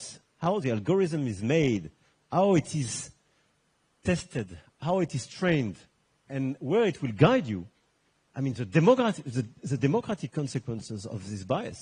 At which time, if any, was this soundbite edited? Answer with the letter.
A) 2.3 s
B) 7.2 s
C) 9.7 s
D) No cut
D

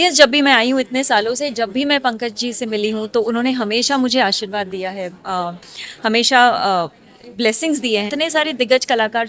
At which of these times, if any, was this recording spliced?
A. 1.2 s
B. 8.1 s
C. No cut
B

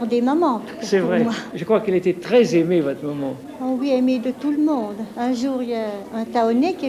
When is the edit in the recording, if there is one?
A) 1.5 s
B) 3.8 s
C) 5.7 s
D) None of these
A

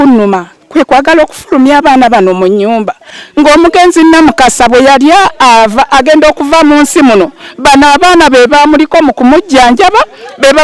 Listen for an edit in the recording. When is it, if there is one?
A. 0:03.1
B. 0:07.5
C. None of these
A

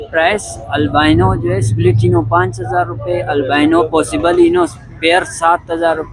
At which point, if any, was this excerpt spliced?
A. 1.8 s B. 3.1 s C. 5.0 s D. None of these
D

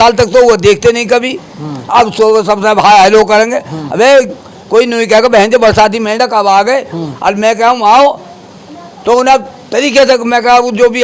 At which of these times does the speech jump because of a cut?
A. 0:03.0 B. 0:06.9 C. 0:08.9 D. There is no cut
D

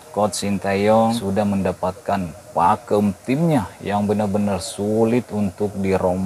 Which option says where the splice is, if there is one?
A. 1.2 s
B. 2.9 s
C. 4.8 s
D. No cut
A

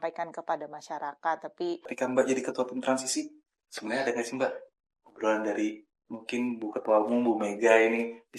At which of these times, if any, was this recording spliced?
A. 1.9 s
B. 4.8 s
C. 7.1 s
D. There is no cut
A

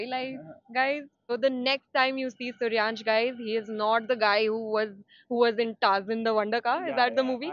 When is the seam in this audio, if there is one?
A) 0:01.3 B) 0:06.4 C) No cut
A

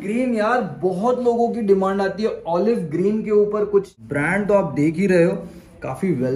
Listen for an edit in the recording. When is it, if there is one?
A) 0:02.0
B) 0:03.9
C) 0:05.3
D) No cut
B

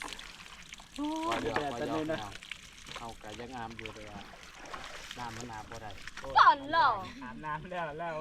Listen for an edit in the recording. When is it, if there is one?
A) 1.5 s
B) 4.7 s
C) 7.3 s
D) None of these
D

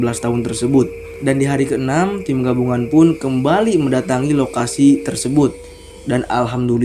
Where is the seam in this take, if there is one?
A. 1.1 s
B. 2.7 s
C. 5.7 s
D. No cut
A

